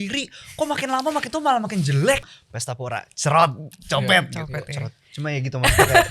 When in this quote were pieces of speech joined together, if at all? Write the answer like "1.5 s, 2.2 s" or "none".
2.2 s